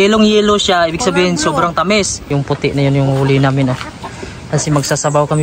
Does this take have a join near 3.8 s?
no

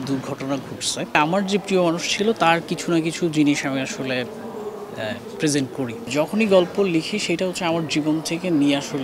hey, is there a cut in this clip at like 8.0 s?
no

